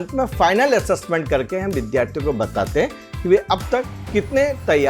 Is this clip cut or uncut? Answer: uncut